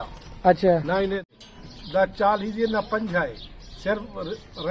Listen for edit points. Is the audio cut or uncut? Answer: cut